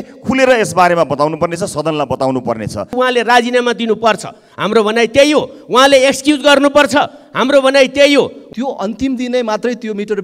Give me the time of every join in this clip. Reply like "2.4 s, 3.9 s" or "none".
2.9 s, 8.4 s